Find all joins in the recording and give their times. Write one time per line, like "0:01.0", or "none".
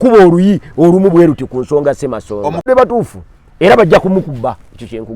0:02.7